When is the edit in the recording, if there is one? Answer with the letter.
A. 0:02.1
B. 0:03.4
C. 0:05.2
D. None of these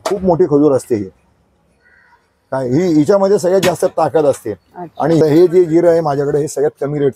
C